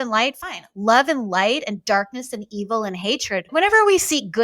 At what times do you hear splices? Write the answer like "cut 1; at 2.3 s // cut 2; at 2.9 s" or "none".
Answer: cut 1; at 3.5 s